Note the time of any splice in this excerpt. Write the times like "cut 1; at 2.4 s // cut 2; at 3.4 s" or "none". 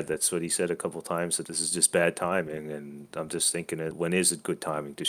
cut 1; at 1.4 s // cut 2; at 3.9 s